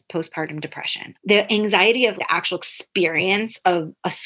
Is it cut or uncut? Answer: cut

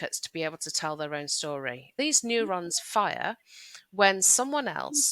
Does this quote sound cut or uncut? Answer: cut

